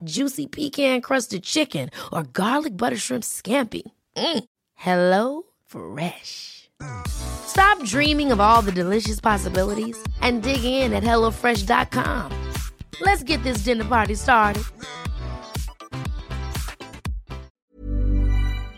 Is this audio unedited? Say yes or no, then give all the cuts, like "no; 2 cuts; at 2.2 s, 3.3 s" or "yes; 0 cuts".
no; 1 cut; at 17.6 s